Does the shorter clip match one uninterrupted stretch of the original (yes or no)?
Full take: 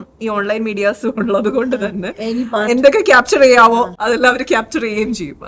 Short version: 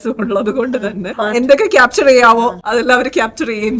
no